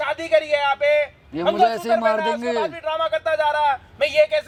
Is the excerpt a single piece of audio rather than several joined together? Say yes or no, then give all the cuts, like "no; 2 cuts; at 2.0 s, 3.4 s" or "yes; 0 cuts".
yes; 0 cuts